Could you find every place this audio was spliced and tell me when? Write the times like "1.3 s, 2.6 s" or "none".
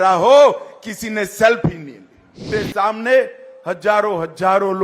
2.5 s

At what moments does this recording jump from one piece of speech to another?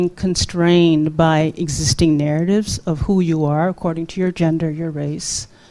none

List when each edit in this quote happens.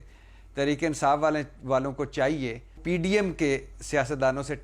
2.8 s

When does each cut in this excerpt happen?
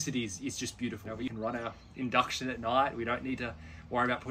1.2 s

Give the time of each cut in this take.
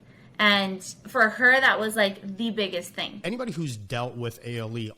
3.1 s

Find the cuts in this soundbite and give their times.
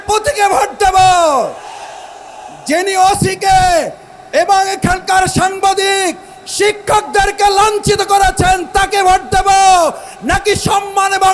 none

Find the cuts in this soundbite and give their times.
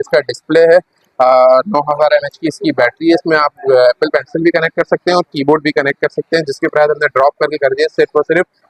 none

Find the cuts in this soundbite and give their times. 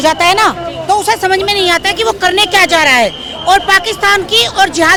none

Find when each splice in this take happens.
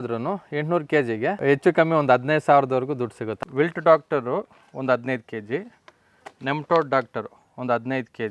1.3 s, 3.2 s

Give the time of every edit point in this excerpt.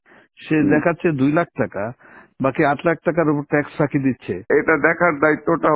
4.5 s

